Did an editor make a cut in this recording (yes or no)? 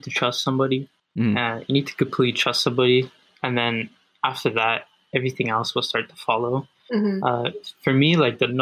yes